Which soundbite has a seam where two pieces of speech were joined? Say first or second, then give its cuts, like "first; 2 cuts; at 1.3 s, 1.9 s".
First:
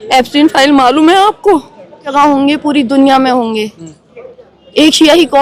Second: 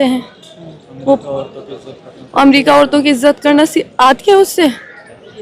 first; 1 cut; at 2.1 s